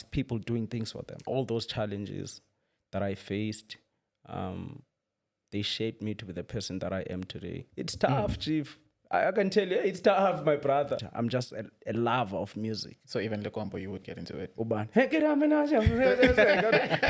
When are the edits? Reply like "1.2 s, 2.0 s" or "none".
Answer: 1.2 s, 7.7 s, 11.0 s